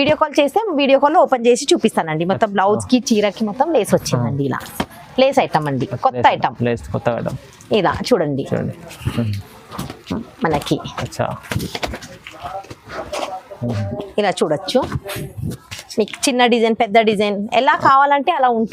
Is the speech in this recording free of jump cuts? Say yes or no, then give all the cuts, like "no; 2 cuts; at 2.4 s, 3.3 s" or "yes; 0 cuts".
yes; 0 cuts